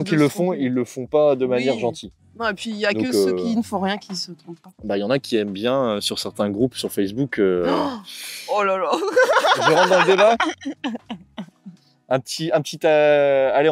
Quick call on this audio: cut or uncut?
uncut